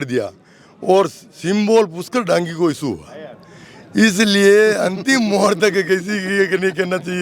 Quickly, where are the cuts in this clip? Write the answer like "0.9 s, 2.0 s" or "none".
none